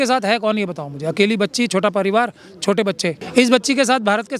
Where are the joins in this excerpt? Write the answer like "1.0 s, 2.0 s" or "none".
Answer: 3.2 s